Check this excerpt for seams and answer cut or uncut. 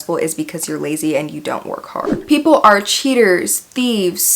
cut